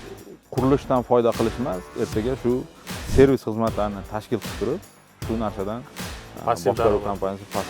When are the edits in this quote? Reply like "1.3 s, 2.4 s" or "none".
none